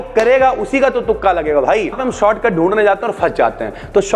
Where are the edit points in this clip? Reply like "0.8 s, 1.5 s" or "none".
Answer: 2.0 s

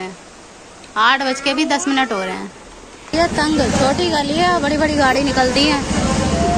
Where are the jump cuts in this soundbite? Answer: 3.1 s

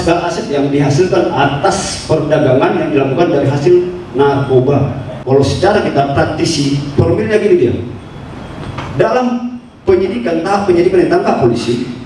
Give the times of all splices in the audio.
5.1 s

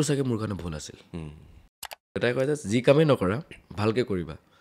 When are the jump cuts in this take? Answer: 2.1 s

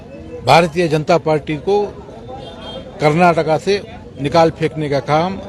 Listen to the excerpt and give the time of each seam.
none

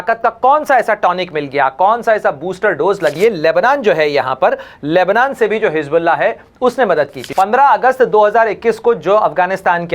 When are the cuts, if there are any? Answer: 3.1 s, 7.2 s

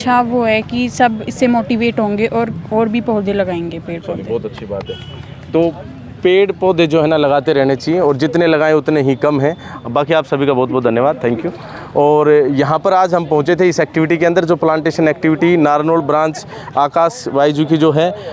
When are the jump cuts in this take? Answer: none

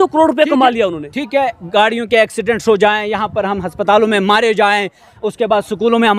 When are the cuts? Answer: none

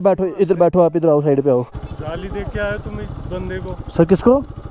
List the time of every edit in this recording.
1.8 s

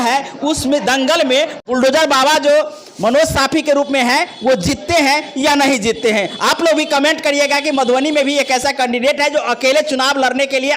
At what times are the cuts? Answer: 1.6 s

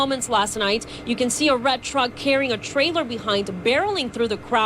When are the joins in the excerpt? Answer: 2.9 s

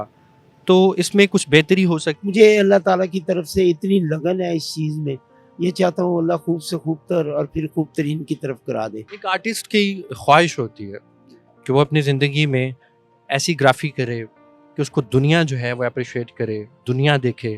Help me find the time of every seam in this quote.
2.2 s, 9.1 s

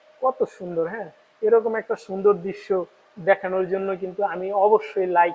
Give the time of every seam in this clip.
none

